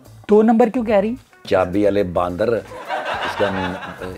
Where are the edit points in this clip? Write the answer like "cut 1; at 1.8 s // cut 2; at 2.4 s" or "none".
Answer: cut 1; at 1.3 s